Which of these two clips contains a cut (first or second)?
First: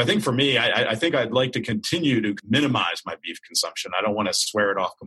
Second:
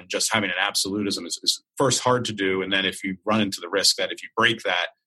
first